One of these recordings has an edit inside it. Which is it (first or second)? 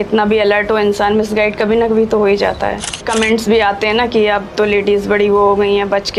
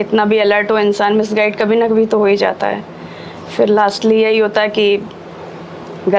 first